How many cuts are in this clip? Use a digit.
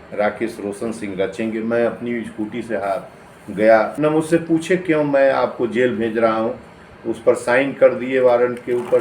1